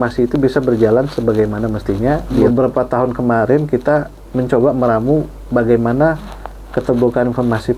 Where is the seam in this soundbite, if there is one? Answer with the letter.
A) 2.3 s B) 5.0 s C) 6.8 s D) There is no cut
A